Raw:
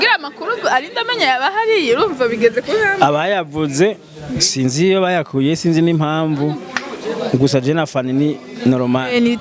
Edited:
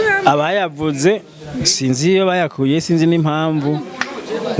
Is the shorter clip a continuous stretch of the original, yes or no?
yes